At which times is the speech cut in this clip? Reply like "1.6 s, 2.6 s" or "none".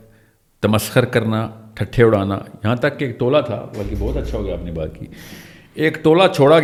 none